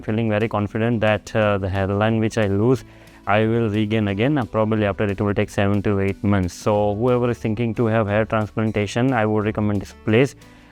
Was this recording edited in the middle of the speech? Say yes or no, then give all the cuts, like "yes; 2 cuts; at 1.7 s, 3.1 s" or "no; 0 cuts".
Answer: no; 0 cuts